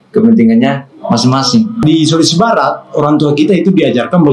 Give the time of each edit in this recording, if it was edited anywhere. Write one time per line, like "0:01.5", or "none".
0:01.8